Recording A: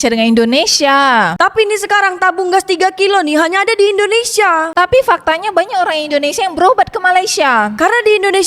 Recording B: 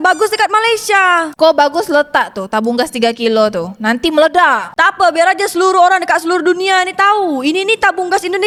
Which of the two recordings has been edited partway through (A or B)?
A